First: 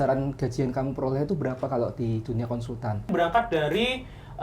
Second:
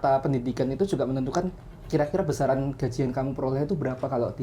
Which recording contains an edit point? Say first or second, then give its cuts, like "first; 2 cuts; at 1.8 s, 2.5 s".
first; 1 cut; at 3.1 s